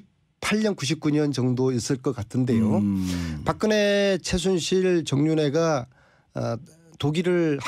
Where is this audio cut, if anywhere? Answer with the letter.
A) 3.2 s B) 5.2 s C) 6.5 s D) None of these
D